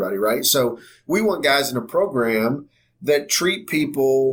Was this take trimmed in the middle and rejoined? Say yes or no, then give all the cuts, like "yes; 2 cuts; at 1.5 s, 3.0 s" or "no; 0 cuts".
no; 0 cuts